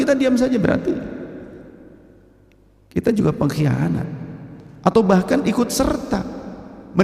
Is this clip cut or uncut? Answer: uncut